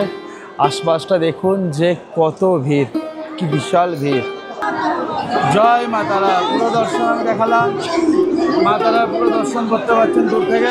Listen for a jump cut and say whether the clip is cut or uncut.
cut